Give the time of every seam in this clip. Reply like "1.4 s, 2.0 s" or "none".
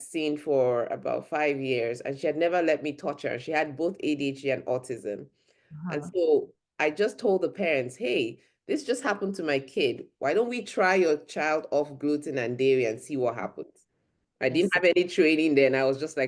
none